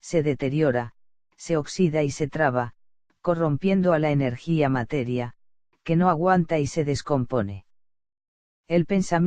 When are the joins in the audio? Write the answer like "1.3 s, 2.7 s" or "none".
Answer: 3.9 s